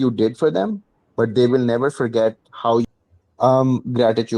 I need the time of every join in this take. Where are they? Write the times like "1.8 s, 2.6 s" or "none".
2.8 s